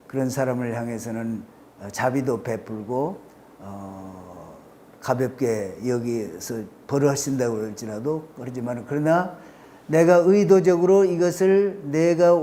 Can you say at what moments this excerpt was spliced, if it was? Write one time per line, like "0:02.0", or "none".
none